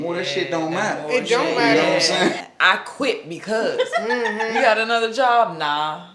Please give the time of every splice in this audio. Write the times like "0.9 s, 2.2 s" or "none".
2.4 s